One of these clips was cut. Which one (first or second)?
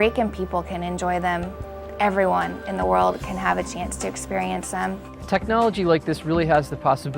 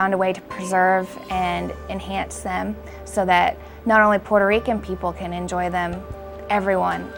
first